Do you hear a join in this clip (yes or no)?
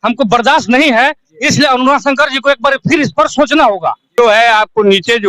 yes